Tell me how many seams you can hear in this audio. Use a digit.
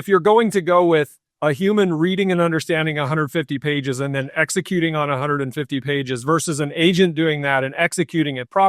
1